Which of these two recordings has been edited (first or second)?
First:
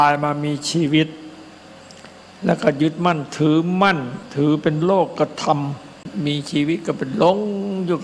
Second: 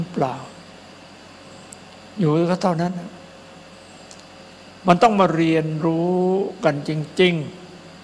first